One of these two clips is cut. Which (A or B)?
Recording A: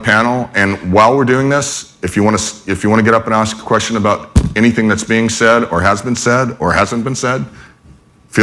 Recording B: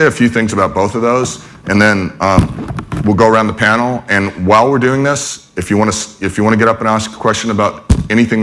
A